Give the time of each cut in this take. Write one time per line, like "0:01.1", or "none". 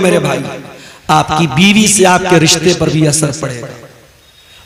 none